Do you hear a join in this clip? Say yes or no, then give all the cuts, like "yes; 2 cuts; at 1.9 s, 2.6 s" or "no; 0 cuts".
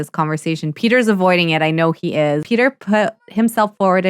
yes; 1 cut; at 2.4 s